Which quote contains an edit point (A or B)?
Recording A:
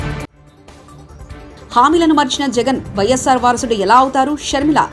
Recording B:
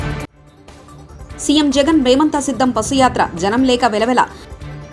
B